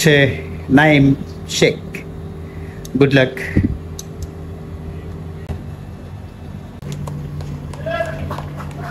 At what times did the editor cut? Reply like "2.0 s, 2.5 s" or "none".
5.5 s